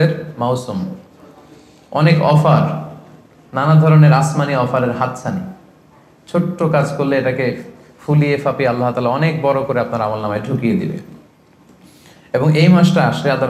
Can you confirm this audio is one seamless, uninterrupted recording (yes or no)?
yes